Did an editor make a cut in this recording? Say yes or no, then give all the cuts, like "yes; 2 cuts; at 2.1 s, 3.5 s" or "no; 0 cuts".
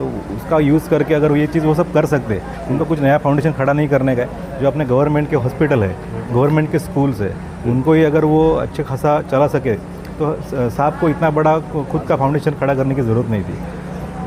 no; 0 cuts